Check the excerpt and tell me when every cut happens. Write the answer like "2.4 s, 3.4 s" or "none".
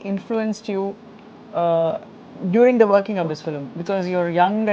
none